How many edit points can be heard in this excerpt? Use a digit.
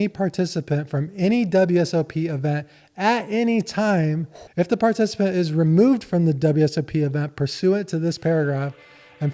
1